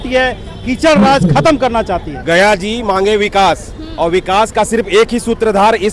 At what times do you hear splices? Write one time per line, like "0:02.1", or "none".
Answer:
0:02.1